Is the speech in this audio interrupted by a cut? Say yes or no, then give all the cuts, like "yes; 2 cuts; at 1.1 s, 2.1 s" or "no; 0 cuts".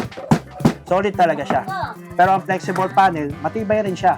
yes; 2 cuts; at 0.8 s, 2.0 s